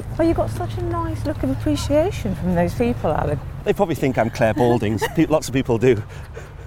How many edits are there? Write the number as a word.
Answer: one